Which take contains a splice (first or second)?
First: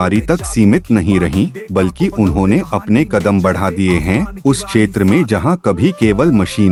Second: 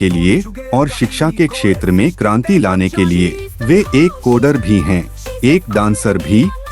second